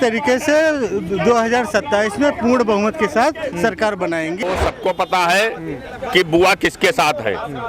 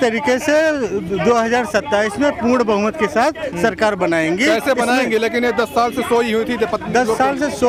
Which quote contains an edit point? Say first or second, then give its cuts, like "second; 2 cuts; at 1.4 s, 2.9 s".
first; 1 cut; at 4.4 s